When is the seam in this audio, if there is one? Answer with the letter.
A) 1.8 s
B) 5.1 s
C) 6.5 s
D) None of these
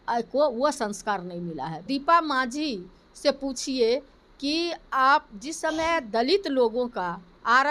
A